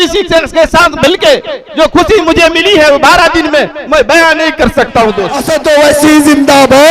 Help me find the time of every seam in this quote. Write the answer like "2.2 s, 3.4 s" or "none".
5.4 s